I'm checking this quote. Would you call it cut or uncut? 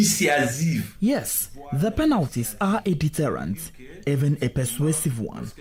uncut